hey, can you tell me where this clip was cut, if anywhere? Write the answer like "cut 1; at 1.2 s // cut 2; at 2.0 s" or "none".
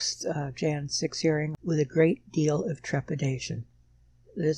cut 1; at 1.5 s

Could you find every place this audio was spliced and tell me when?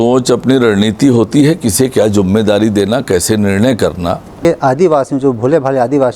cut 1; at 4.4 s

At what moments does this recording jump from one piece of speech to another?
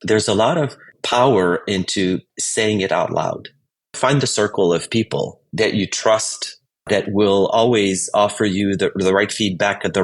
cut 1; at 2.4 s // cut 2; at 3.9 s

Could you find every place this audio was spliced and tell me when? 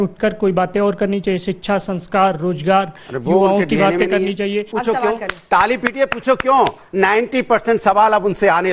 cut 1; at 4.7 s

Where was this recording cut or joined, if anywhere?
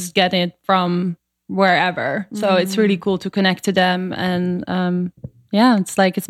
none

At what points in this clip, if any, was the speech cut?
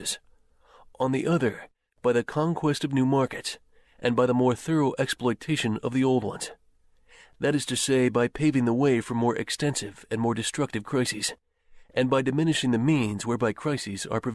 cut 1; at 4.3 s

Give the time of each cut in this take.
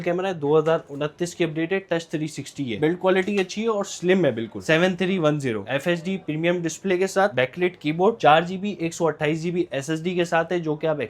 cut 1; at 2.8 s // cut 2; at 4.6 s // cut 3; at 5.6 s

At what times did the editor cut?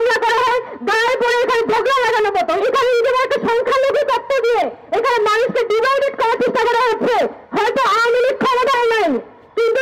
cut 1; at 2.6 s // cut 2; at 7.4 s

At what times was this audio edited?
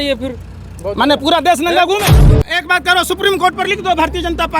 cut 1; at 2.4 s

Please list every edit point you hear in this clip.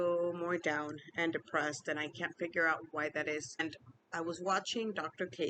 cut 1; at 3.6 s

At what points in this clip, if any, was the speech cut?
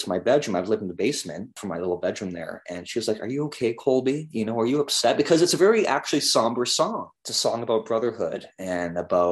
cut 1; at 1.5 s

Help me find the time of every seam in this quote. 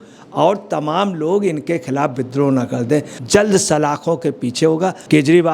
cut 1; at 3.1 s

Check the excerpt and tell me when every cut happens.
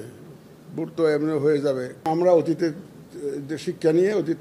cut 1; at 2.0 s

